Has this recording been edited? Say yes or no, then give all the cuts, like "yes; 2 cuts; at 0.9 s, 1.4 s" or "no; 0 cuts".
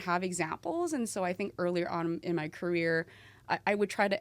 no; 0 cuts